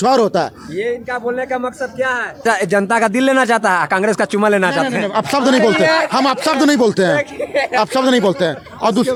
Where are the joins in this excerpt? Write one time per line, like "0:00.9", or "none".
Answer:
none